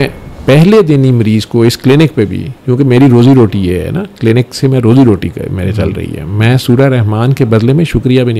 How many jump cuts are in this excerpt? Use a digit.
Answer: 0